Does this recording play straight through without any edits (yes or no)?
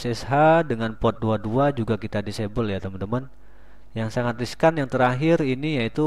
yes